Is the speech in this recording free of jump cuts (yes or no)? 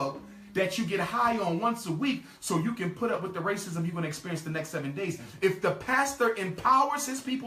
yes